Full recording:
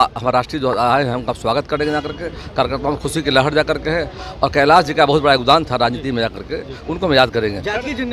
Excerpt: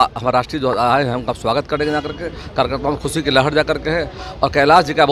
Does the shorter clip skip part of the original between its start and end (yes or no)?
no